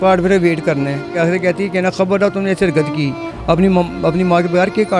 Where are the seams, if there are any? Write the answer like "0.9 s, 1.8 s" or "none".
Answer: 1.1 s